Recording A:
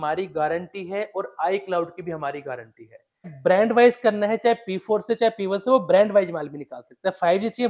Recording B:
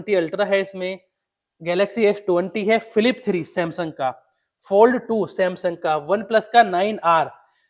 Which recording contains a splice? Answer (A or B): A